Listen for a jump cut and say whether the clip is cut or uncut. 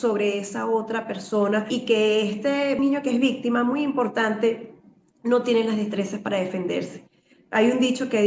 cut